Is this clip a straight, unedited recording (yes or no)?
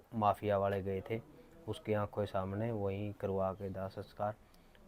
yes